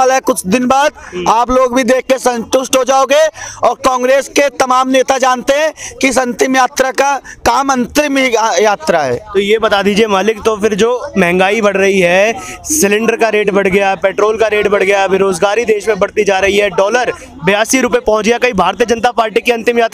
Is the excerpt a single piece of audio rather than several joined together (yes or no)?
yes